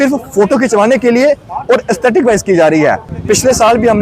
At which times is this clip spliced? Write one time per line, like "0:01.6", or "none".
0:03.1